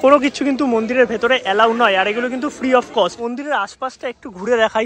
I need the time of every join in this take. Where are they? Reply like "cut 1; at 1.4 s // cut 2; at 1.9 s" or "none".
none